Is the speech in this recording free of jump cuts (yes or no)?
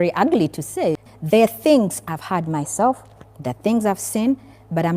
no